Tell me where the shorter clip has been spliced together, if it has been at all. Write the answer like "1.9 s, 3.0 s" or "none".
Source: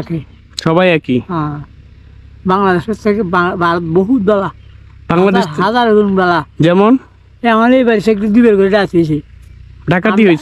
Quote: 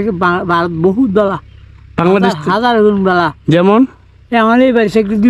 none

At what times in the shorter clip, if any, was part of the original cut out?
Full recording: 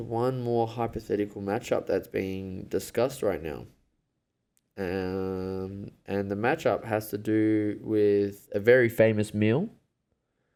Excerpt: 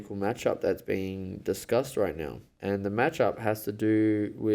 2.4 s

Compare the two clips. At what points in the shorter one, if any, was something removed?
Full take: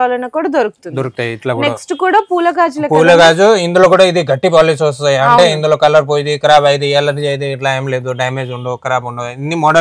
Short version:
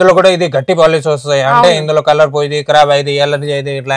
none

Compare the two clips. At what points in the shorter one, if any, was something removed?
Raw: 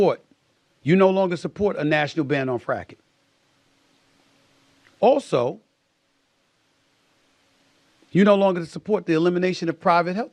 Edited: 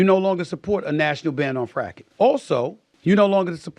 2.0 s, 2.9 s

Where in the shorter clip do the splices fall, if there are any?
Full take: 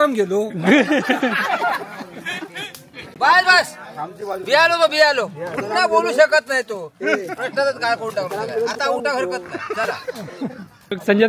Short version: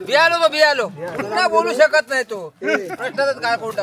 none

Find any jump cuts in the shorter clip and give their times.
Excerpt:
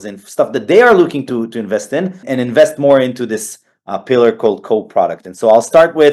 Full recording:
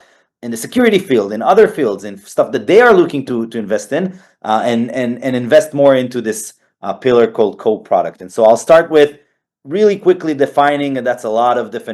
2.2 s

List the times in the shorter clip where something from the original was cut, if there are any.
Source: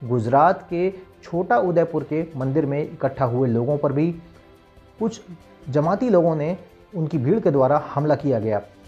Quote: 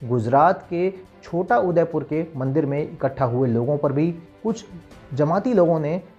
4.3 s

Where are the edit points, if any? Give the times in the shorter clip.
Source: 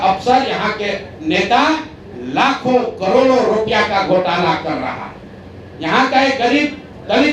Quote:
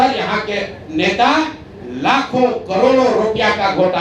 none

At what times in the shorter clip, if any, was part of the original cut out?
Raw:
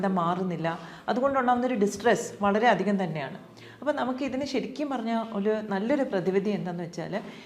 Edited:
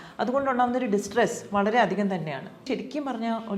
2.6 s

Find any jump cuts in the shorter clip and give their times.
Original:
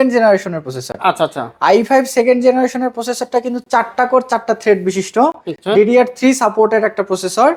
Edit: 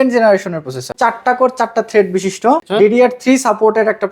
0.9 s, 2.7 s

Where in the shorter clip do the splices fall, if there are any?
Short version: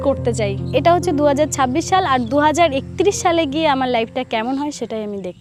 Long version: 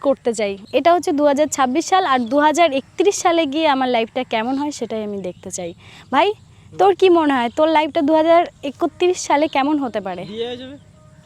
none

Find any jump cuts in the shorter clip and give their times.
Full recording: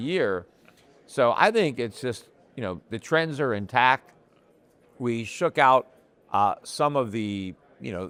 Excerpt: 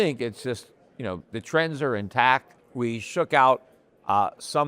2.6 s

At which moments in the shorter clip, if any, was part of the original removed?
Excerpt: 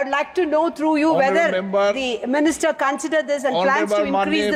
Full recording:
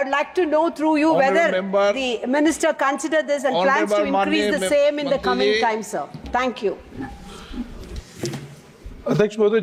none

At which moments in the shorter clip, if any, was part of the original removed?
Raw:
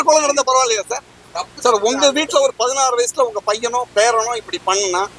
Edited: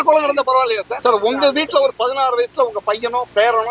0.9 s

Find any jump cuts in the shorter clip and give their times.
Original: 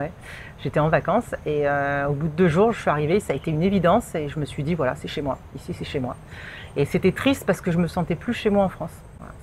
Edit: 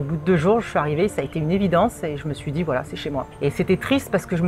3.3 s

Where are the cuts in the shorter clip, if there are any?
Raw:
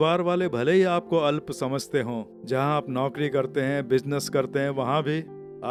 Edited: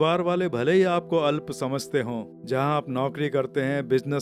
none

